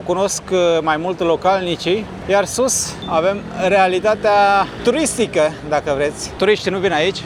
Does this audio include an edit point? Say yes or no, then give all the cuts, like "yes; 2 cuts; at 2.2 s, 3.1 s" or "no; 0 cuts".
no; 0 cuts